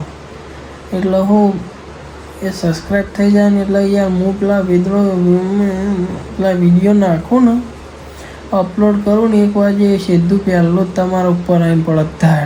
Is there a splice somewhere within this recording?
no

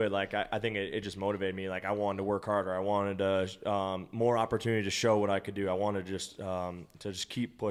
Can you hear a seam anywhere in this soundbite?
no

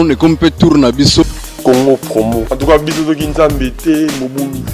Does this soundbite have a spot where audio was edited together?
yes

